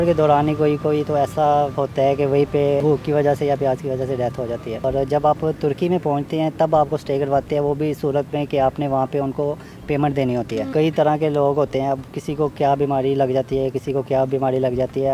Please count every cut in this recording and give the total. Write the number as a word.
four